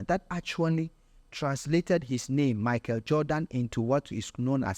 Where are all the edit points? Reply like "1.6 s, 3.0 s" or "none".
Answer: none